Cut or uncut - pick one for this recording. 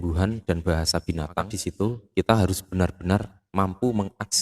cut